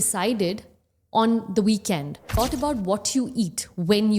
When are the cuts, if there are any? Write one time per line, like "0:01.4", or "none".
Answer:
0:02.4